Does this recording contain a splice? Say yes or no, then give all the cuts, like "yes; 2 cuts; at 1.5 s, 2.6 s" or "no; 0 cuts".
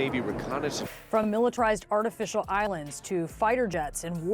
yes; 1 cut; at 1.2 s